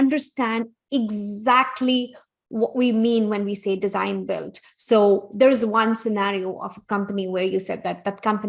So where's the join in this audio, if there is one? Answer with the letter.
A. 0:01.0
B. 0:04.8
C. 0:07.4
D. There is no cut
D